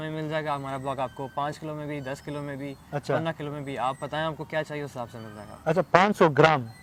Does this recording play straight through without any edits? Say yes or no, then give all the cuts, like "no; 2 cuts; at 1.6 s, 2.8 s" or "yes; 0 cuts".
yes; 0 cuts